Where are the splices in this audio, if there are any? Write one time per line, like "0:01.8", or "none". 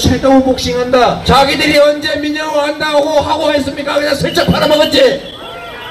0:01.2